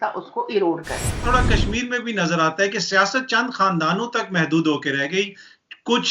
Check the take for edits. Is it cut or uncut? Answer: cut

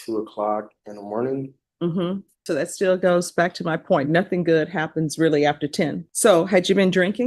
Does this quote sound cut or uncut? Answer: cut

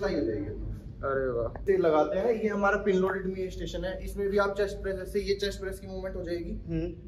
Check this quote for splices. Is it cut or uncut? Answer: cut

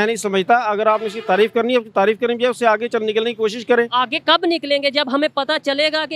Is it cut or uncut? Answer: uncut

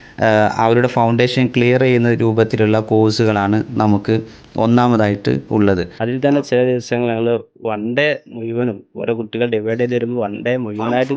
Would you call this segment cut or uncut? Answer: cut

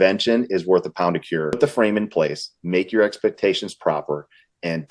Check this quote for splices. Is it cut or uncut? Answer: cut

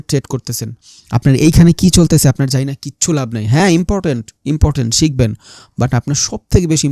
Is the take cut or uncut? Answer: uncut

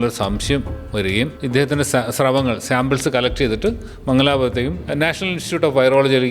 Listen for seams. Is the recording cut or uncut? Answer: cut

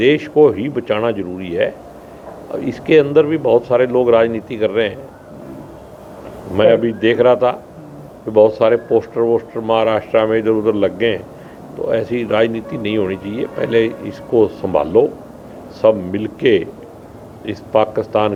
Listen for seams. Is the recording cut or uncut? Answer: uncut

